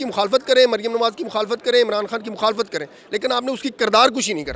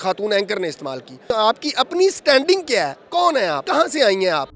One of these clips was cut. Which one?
second; 2 cuts; at 1.3 s, 3.6 s

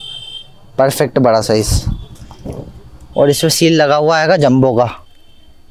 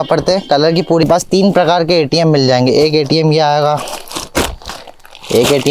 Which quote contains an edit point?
second; 1 cut; at 1.0 s

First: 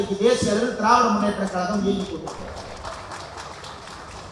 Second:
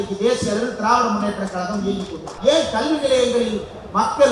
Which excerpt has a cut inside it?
second; 1 cut; at 2.3 s

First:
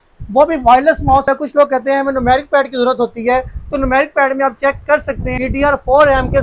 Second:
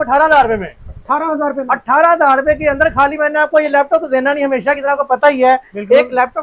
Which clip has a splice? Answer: first; 2 cuts; at 1.2 s, 5.3 s

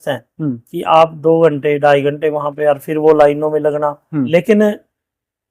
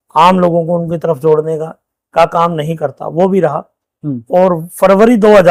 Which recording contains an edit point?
first; 1 cut; at 4.3 s

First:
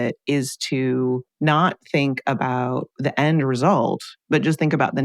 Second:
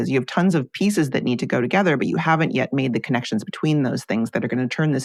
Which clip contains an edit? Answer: first; 3 cuts; at 1.3 s, 2.9 s, 4.1 s

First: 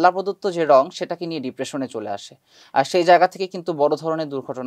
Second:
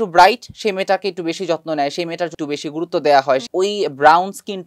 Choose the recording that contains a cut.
second; 2 cuts; at 2.3 s, 3.5 s

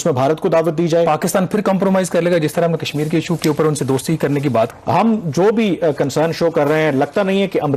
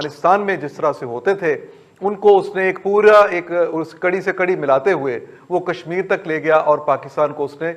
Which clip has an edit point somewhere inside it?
first; 2 cuts; at 1.1 s, 4.7 s

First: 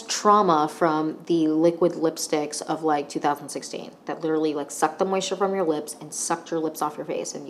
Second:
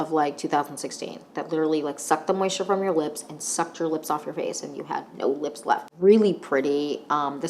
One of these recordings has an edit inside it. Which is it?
second; 1 cut; at 5.9 s

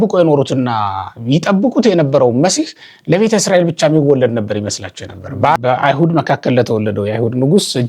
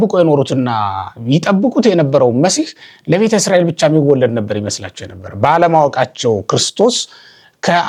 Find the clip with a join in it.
first; 1 cut; at 5.6 s

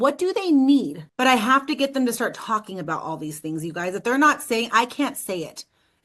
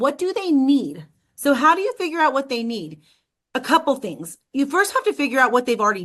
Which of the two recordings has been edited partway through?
first; 1 cut; at 1.0 s

